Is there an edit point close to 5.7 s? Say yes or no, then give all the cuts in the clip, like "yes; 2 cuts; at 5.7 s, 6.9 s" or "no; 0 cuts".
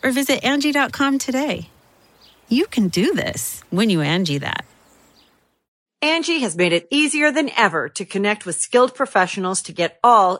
yes; 1 cut; at 5.7 s